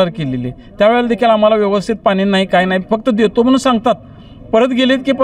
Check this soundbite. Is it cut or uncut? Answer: uncut